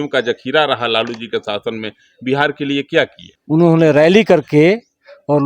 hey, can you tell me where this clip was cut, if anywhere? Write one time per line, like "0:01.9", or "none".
0:03.3